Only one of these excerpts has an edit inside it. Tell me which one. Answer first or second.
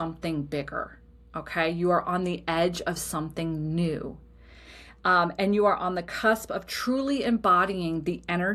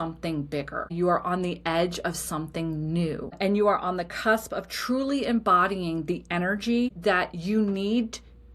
second